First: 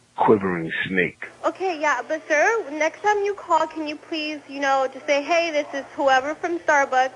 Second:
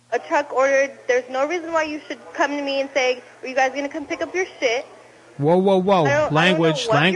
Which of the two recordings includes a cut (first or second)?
first